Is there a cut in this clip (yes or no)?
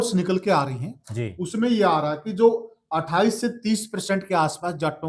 no